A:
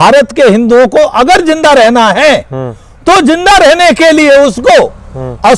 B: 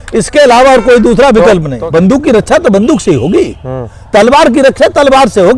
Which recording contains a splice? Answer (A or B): B